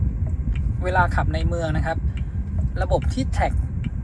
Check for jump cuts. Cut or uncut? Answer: uncut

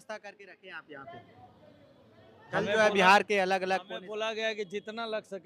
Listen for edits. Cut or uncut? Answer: uncut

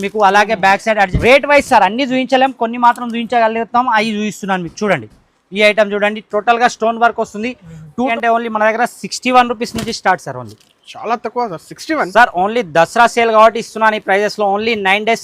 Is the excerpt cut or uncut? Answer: cut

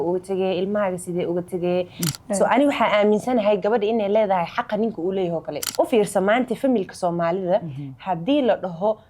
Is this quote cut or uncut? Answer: cut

